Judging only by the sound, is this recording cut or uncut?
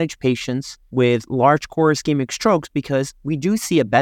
uncut